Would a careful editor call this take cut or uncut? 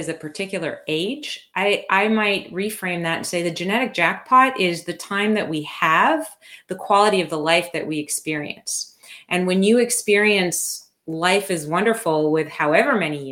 uncut